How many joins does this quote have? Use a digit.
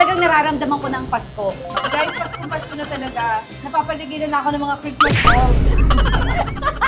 0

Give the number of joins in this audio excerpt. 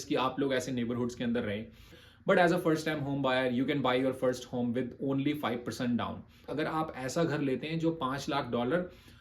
2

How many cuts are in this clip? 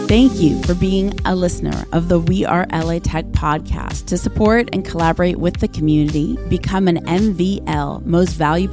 0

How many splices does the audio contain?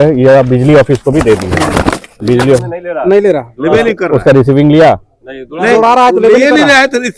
0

